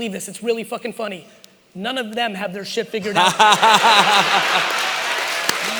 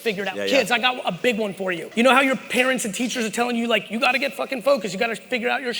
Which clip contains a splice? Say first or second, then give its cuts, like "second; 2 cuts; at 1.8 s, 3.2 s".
second; 1 cut; at 1.8 s